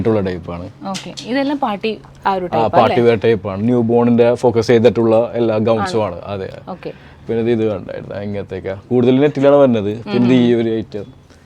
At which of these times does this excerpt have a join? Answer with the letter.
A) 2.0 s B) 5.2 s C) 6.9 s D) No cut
D